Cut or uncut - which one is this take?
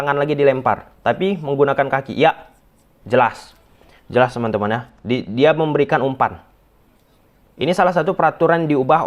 uncut